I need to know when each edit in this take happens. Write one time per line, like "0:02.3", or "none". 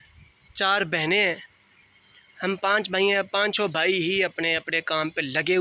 none